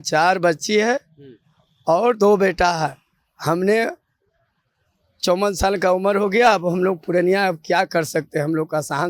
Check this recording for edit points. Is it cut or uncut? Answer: uncut